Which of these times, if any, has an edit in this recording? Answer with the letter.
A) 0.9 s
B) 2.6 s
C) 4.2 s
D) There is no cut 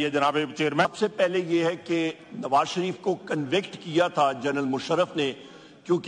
A